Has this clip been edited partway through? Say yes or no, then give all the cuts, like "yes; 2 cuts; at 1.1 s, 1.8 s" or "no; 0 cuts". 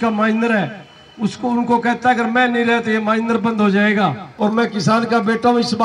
yes; 1 cut; at 4.2 s